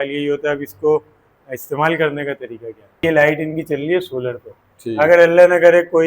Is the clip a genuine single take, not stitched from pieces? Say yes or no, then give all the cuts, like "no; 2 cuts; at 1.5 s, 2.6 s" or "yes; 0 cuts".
no; 1 cut; at 3.0 s